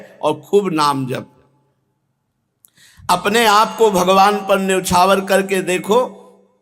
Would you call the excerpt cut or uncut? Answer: uncut